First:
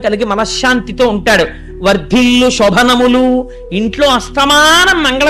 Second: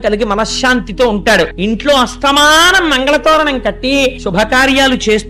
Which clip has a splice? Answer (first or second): second